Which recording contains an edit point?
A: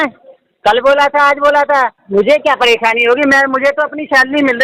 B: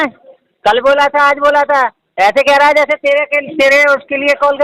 A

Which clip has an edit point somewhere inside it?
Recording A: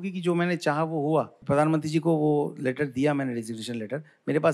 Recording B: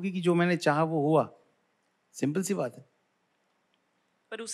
A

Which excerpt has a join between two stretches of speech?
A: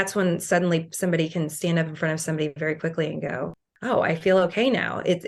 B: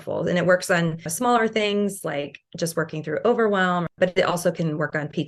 B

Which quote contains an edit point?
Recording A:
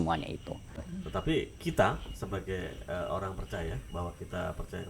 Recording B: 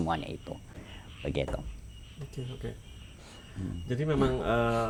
A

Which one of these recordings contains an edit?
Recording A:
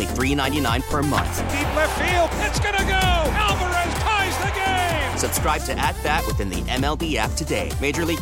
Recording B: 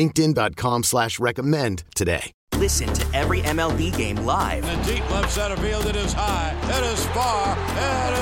B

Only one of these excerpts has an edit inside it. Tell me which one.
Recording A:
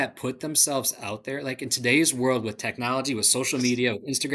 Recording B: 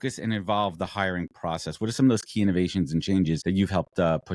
B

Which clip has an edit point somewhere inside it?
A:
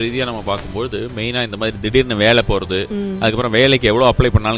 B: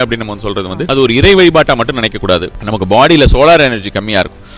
B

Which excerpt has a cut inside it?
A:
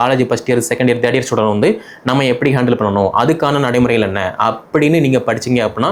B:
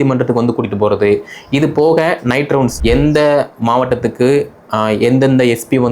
B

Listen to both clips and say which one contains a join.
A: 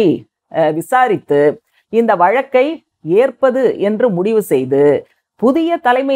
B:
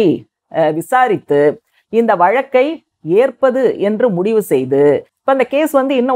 B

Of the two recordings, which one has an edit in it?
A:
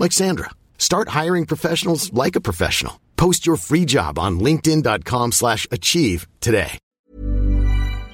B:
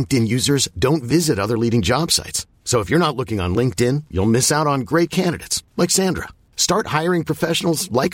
A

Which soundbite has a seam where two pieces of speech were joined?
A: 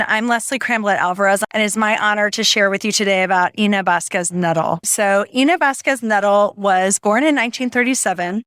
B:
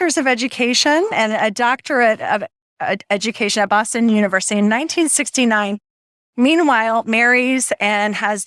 A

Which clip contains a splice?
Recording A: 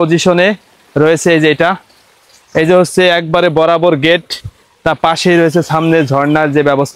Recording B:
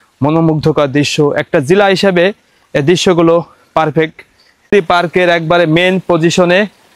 B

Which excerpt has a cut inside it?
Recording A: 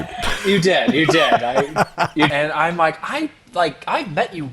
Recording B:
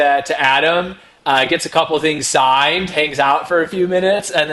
A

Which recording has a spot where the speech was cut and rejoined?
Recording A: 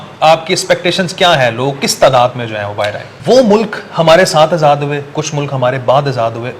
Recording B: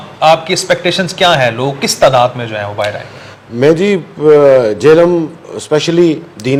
A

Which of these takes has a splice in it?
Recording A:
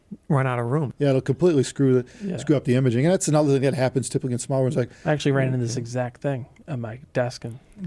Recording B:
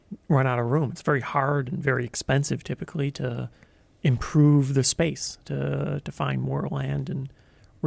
A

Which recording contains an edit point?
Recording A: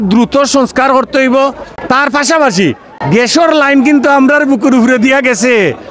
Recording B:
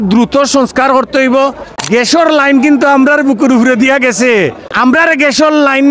B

